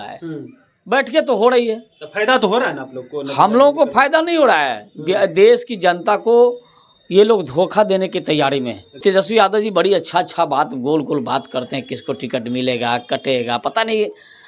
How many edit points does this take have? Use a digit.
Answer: 1